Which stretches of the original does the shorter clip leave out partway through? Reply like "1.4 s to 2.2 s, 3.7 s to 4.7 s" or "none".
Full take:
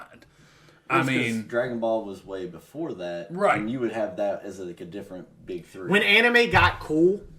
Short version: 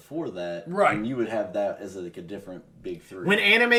none